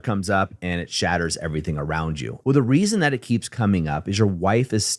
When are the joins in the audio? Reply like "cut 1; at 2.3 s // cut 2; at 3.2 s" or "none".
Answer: cut 1; at 2.3 s